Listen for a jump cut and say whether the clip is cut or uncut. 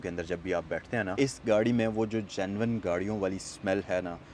cut